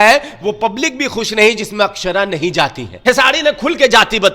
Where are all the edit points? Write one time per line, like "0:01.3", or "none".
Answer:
0:03.0